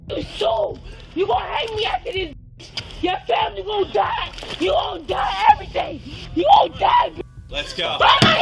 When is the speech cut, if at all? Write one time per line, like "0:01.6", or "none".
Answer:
0:06.2
0:07.4